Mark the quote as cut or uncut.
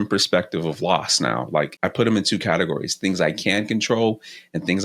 cut